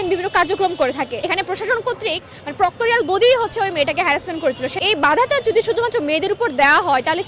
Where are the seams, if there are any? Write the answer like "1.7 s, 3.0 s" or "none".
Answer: 1.2 s, 4.8 s